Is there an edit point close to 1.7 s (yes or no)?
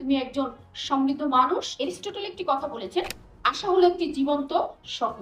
yes